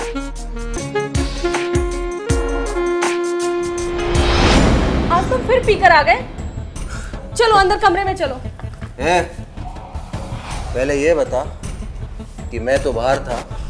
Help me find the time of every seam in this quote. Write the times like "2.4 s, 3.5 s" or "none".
0.8 s, 4.5 s